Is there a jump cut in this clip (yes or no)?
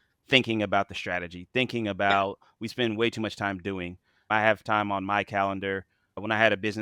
no